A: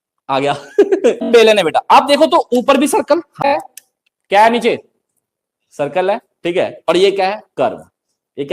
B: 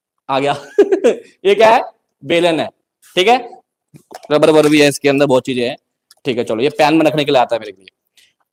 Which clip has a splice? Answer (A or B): A